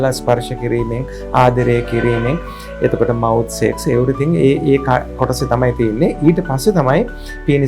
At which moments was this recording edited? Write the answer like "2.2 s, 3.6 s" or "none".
none